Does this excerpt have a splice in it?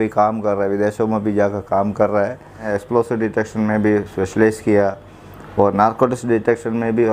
yes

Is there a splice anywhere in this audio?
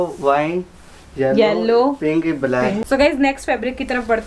yes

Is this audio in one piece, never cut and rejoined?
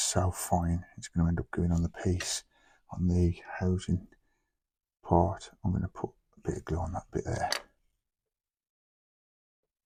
yes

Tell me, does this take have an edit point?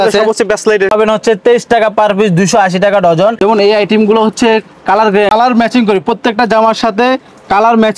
yes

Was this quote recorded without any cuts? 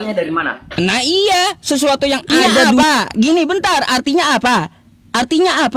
no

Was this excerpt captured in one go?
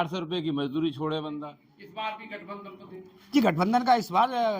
no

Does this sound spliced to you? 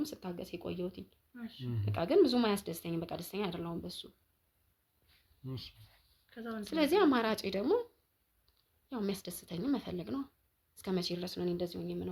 no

